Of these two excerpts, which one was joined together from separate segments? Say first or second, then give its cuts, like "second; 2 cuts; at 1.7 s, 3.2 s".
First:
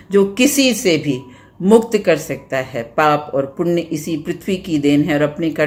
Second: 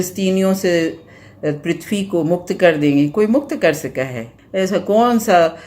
second; 1 cut; at 4.3 s